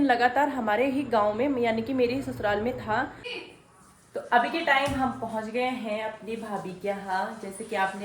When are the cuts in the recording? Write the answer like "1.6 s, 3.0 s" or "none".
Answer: 3.3 s